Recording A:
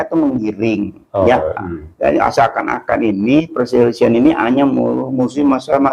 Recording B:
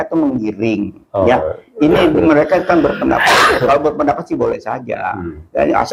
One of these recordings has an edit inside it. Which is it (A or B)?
A